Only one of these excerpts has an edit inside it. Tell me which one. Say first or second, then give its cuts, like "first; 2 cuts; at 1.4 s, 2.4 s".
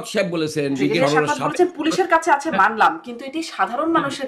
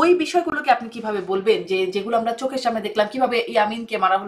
first; 1 cut; at 0.9 s